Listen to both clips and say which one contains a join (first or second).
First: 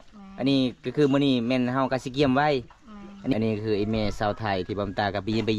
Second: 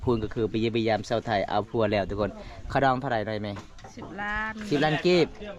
first